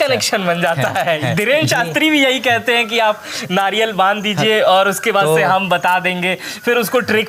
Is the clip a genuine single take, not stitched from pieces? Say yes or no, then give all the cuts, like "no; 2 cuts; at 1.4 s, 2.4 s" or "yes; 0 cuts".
yes; 0 cuts